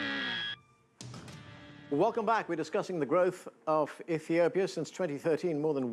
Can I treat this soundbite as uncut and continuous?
yes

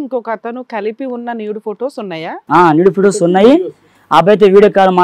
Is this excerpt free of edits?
yes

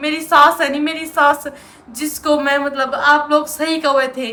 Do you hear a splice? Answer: no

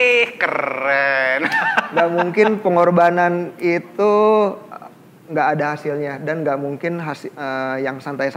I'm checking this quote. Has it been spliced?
no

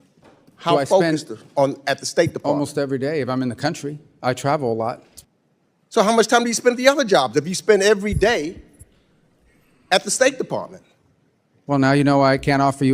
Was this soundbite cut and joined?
yes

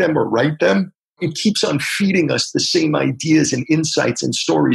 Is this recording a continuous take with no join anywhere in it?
no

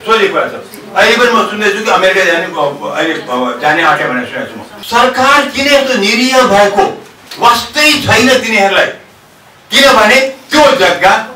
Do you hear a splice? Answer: yes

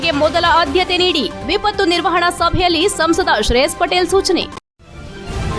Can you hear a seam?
yes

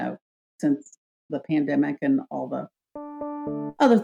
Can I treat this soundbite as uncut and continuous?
yes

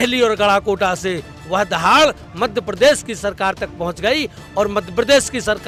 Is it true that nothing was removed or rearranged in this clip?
yes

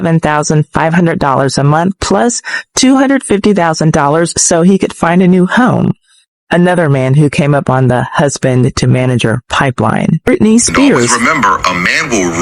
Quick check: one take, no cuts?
no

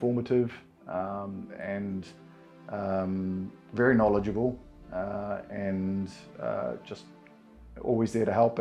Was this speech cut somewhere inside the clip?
no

